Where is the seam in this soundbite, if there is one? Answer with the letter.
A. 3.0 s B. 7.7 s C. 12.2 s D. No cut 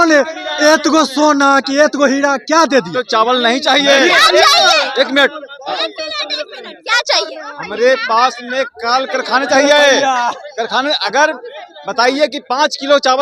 A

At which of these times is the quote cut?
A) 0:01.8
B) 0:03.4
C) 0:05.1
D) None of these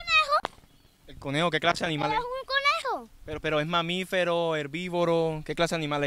D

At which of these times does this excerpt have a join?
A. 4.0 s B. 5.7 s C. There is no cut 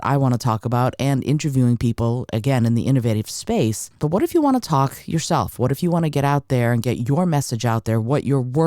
A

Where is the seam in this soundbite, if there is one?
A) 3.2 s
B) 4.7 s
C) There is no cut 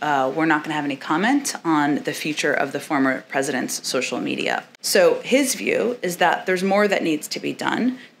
B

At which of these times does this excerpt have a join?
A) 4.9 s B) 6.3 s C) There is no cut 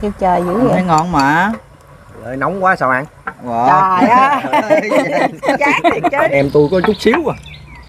B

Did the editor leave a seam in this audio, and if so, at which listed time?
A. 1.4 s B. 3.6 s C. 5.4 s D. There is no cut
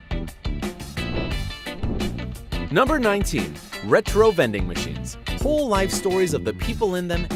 D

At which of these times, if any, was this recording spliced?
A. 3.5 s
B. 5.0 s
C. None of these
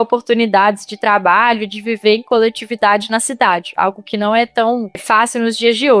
B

